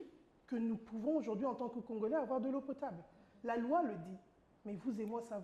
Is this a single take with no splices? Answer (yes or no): yes